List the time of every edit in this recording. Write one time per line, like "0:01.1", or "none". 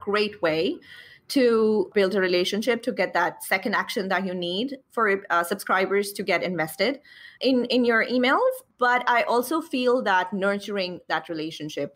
0:01.9
0:07.3
0:08.7